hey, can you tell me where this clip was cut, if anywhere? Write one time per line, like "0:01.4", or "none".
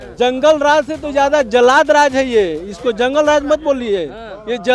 none